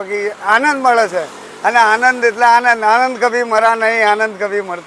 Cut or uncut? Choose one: uncut